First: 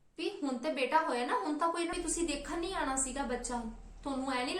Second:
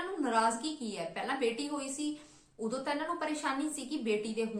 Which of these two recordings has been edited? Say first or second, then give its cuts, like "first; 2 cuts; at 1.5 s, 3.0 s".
first; 1 cut; at 1.9 s